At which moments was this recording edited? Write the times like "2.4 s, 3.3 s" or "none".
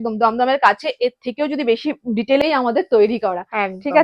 2.4 s